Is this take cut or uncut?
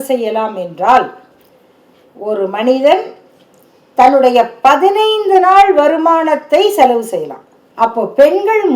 cut